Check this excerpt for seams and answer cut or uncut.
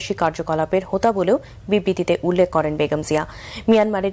uncut